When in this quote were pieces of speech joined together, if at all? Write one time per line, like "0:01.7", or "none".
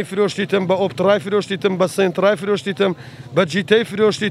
none

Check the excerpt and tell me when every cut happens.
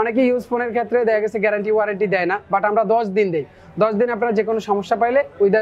none

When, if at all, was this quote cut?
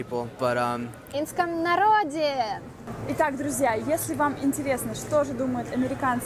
none

